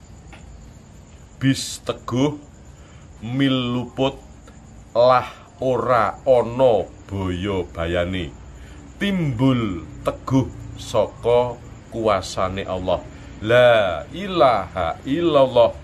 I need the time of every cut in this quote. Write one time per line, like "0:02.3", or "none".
0:01.2